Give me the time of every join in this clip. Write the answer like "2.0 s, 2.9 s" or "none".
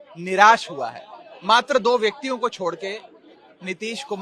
none